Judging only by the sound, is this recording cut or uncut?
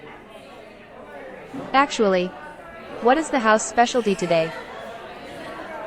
cut